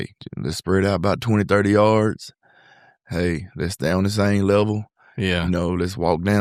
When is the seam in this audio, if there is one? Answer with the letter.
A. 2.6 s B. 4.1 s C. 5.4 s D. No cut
D